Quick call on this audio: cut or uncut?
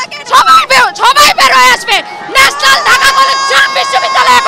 uncut